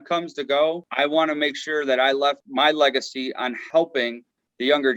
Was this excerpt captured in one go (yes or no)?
no